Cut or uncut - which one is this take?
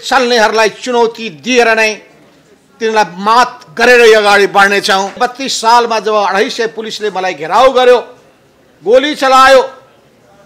cut